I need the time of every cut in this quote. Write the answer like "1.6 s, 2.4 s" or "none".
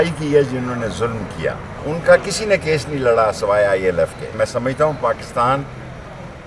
1.7 s, 4.3 s